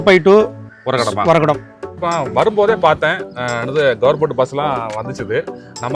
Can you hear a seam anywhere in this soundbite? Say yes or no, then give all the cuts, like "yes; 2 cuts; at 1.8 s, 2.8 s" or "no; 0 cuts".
yes; 1 cut; at 2.0 s